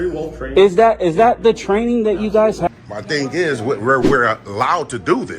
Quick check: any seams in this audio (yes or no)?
yes